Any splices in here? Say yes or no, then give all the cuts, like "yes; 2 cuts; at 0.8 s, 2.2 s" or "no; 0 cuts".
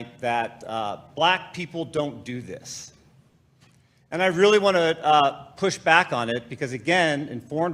no; 0 cuts